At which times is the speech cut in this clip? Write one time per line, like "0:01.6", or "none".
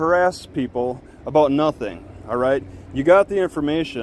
none